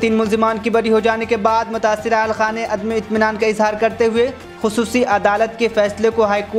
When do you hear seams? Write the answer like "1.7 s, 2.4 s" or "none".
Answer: none